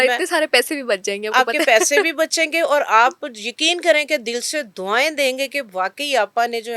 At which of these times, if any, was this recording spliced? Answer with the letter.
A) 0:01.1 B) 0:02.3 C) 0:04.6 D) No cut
D